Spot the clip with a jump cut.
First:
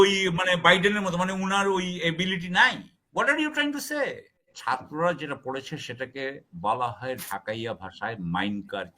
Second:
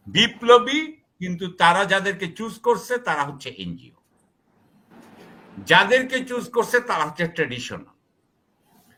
first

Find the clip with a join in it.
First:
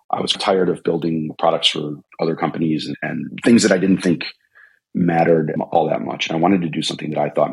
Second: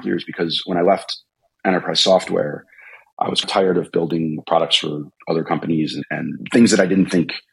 first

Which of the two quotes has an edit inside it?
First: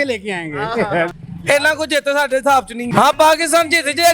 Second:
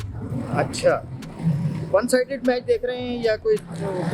first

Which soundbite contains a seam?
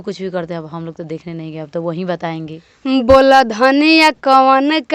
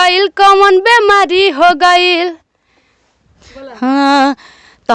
first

